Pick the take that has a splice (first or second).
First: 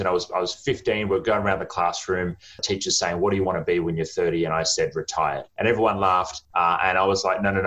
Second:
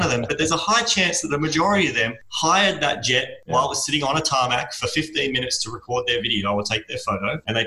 first